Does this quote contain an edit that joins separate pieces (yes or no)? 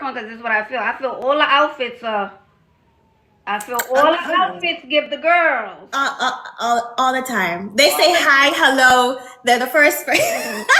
no